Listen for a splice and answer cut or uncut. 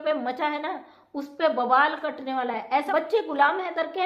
cut